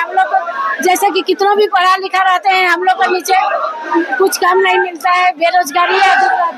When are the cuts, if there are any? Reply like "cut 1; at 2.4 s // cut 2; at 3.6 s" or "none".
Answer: none